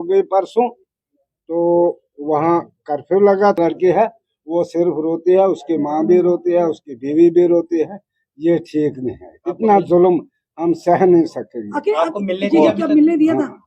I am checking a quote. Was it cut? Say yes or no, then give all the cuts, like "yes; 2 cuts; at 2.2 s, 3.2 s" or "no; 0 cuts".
yes; 1 cut; at 3.6 s